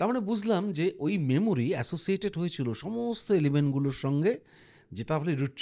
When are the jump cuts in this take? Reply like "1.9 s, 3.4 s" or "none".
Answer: none